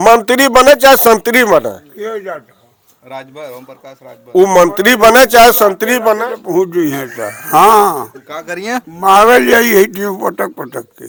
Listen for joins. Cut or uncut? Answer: uncut